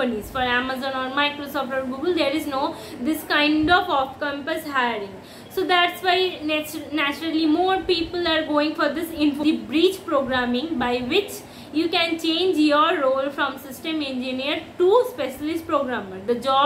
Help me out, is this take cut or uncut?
cut